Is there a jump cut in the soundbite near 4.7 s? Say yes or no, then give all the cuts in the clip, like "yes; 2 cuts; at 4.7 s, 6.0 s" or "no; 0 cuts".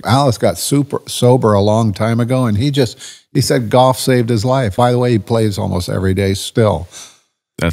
yes; 1 cut; at 4.7 s